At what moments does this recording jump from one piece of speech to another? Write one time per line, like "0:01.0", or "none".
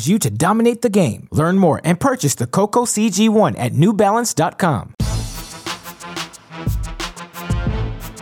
0:04.9